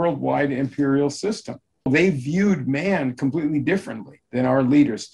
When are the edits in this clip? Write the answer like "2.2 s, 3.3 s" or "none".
1.9 s, 4.2 s